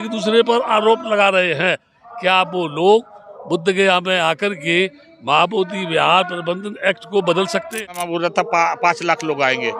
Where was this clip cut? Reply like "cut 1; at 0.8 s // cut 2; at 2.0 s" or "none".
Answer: cut 1; at 7.8 s